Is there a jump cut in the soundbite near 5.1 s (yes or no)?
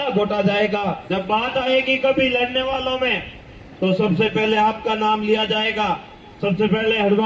no